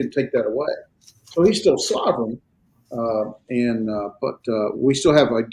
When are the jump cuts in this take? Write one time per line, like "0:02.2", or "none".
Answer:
none